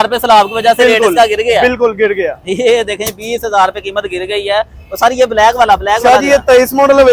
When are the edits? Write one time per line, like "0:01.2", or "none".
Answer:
none